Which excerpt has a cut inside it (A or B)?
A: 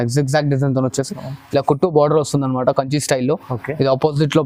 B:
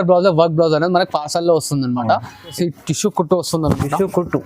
B